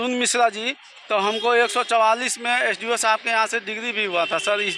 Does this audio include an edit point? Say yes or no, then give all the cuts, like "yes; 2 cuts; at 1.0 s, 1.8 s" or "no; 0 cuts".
no; 0 cuts